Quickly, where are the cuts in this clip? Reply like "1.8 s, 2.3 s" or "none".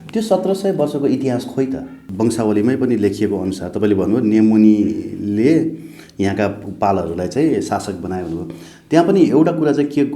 2.0 s